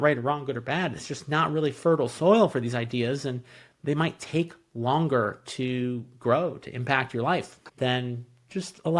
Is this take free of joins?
no; 1 cut; at 7.6 s

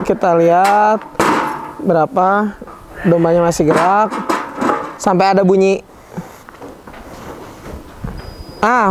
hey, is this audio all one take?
yes; 0 cuts

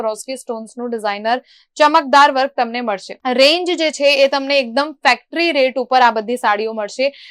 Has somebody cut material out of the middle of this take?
no; 0 cuts

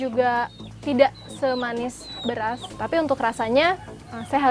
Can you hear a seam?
yes; 1 cut; at 2.8 s

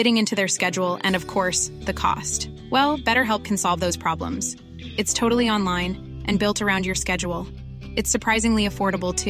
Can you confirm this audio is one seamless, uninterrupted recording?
yes; 0 cuts

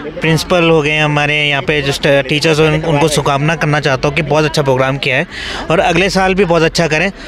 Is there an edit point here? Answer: no; 0 cuts

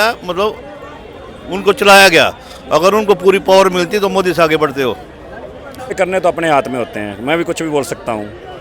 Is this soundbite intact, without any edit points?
no; 1 cut; at 5.9 s

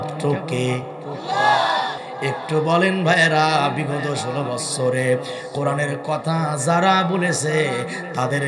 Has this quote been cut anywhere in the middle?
yes; 1 cut; at 2.0 s

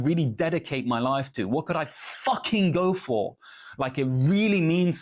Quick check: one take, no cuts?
yes; 0 cuts

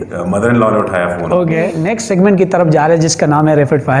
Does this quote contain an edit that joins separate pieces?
yes; 1 cut; at 1.8 s

